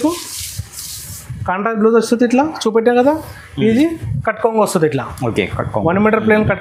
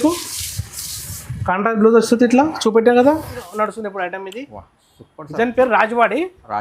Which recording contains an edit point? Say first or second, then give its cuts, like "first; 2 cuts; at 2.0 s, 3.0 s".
second; 1 cut; at 3.4 s